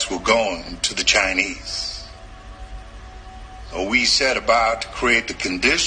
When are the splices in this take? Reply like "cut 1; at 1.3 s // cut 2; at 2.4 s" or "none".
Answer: cut 1; at 2.2 s